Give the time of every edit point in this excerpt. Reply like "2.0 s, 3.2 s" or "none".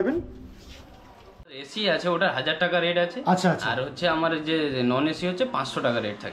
1.7 s